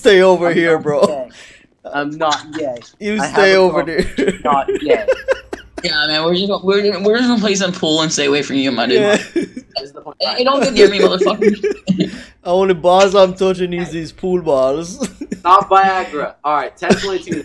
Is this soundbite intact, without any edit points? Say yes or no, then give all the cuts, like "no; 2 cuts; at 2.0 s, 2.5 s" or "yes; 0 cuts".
yes; 0 cuts